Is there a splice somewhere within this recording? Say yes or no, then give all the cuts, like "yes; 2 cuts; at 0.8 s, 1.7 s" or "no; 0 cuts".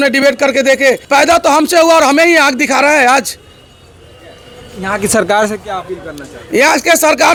no; 0 cuts